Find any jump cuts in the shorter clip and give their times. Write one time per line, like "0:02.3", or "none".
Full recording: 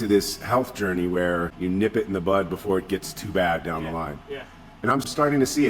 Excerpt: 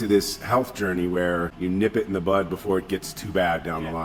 none